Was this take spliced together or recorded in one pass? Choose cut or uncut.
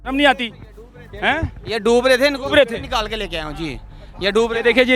uncut